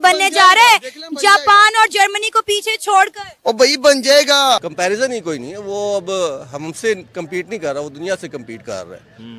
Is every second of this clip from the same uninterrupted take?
no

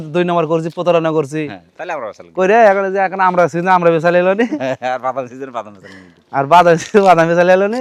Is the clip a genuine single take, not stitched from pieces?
yes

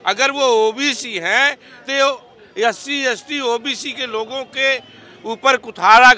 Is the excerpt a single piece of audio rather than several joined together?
yes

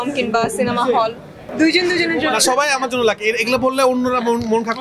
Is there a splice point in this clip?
yes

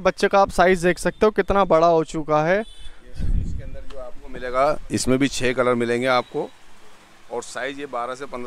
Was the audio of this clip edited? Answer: no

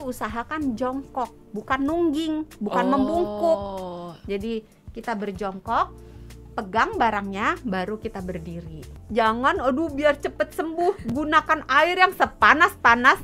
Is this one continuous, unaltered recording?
no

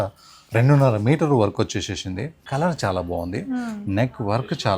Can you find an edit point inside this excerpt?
yes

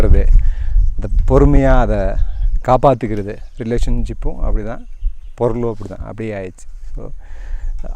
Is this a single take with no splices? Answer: yes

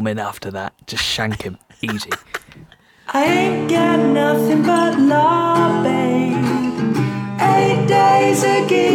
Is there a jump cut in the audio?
yes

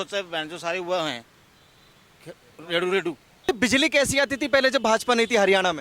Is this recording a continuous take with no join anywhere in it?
no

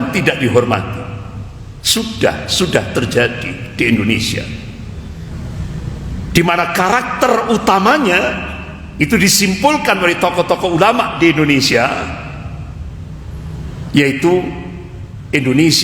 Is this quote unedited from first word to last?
no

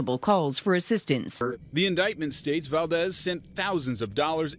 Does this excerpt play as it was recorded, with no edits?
no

